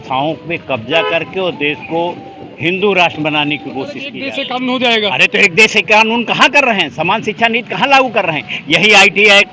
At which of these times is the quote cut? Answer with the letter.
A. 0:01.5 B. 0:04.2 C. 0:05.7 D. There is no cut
B